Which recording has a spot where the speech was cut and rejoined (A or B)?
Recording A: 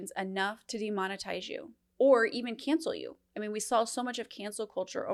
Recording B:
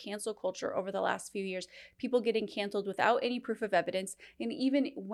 A